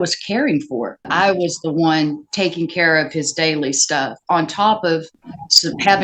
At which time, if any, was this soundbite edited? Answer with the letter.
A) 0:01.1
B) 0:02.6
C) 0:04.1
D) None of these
A